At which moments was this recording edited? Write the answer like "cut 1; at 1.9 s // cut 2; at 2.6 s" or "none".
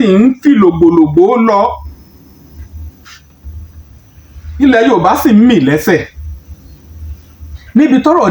none